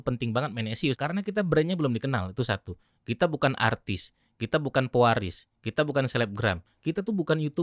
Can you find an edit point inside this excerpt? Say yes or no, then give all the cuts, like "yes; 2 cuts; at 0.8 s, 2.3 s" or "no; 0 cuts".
yes; 2 cuts; at 1.0 s, 6.7 s